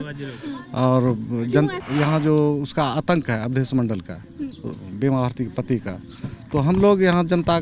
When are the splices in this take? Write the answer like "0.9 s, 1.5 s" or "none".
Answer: 1.8 s